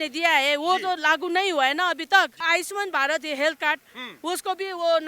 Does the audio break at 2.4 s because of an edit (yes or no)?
yes